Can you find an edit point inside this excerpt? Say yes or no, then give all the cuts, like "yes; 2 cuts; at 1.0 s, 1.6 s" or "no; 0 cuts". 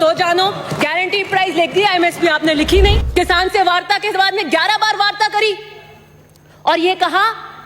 yes; 1 cut; at 3.0 s